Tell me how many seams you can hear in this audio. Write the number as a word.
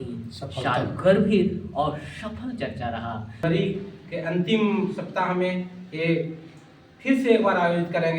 one